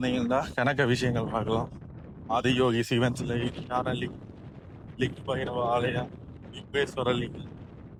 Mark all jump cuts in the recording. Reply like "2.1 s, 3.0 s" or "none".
none